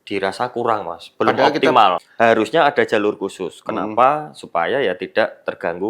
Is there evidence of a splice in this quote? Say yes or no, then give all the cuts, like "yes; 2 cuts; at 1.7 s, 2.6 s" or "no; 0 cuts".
yes; 1 cut; at 2.0 s